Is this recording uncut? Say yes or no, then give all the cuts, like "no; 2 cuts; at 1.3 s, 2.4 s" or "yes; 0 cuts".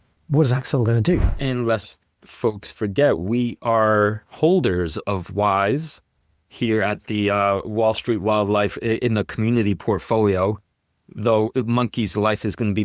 no; 1 cut; at 1.3 s